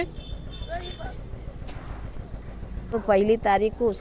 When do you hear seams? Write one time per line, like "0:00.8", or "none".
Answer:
0:02.9